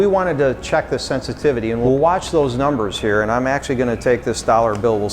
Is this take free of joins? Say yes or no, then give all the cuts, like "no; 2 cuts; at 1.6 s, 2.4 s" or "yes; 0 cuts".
yes; 0 cuts